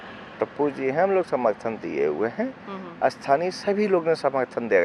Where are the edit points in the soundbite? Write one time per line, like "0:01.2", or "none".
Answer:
none